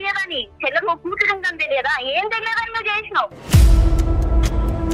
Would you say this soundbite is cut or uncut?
cut